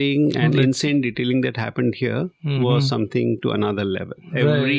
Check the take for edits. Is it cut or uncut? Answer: uncut